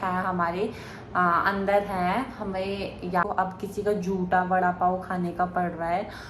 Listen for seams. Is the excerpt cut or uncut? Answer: cut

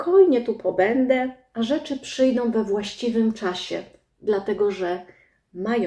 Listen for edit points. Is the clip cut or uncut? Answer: uncut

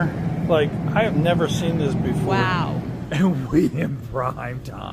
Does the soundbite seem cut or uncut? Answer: cut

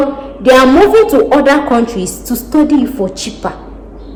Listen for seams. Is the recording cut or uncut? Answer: uncut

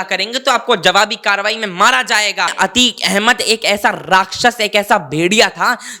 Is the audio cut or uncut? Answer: cut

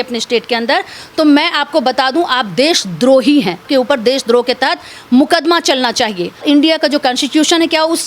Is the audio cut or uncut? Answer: cut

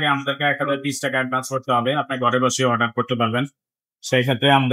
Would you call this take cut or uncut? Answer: uncut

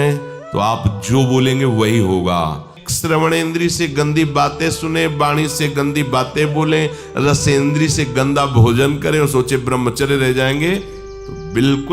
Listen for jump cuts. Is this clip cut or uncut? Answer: cut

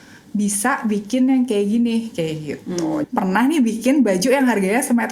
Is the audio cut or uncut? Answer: cut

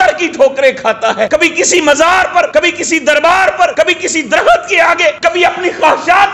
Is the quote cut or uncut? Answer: cut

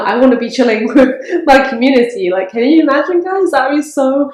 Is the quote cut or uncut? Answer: uncut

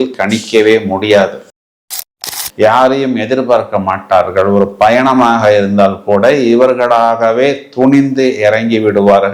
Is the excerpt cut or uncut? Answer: cut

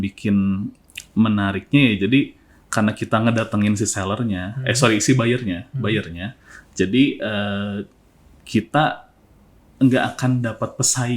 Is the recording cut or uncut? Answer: uncut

